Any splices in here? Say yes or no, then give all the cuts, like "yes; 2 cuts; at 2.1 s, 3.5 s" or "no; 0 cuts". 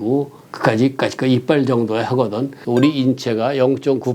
yes; 1 cut; at 2.5 s